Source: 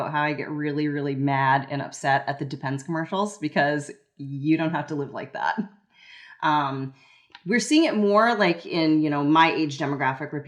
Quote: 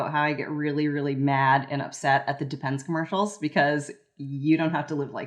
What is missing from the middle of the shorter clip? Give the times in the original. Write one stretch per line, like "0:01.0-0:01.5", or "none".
none